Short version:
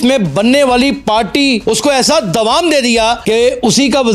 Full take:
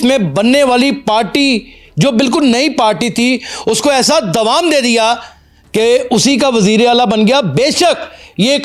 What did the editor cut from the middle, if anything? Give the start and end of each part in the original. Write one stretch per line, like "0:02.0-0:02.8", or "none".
0:01.6-0:03.6
0:05.2-0:05.7